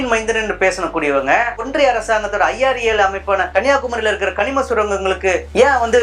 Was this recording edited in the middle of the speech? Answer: no; 0 cuts

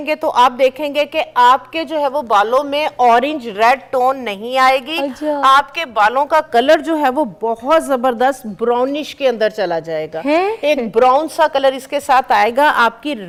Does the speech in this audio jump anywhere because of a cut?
no; 0 cuts

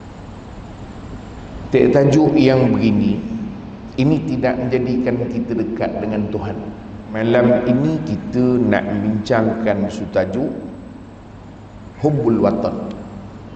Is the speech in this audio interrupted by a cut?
yes; 1 cut; at 7.2 s

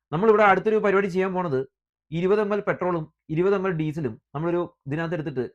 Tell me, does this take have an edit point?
no; 0 cuts

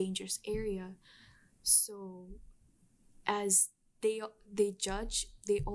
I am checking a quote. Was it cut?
no; 0 cuts

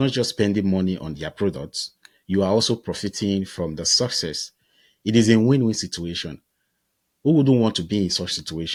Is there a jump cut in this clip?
no; 0 cuts

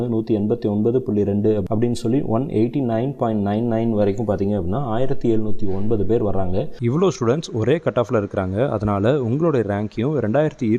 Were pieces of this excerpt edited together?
no; 0 cuts

